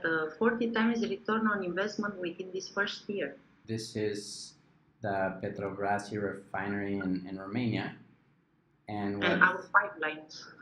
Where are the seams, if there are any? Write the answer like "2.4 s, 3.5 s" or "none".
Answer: 3.6 s